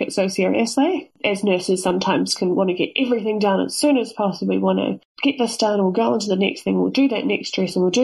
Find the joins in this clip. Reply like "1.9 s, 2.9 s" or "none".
1.1 s, 5.1 s